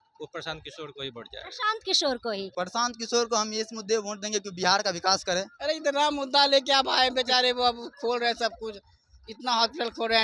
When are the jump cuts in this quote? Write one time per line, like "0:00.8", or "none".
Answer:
0:02.5
0:05.5